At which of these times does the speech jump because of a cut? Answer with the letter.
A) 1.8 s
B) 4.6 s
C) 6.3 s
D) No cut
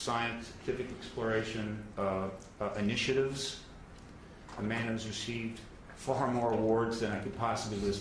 D